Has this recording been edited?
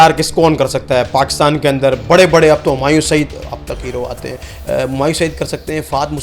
no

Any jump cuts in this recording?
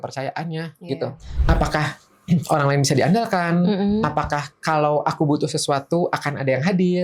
yes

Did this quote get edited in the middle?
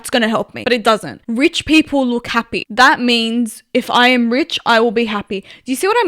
yes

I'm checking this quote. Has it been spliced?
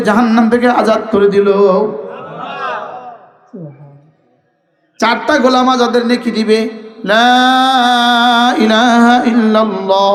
no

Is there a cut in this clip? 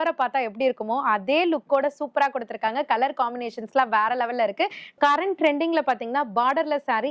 yes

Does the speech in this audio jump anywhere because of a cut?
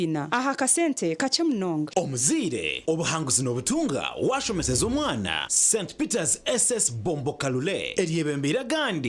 yes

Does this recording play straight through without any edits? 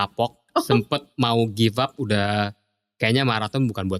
yes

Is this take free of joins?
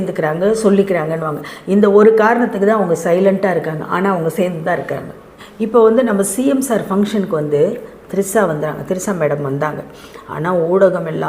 no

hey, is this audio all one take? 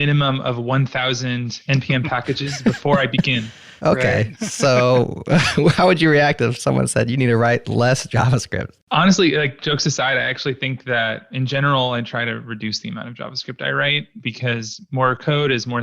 no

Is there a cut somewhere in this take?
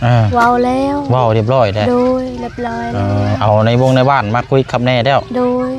no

